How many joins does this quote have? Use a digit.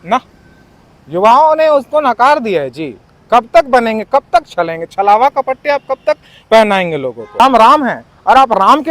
1